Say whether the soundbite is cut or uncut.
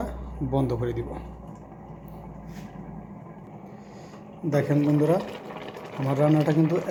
uncut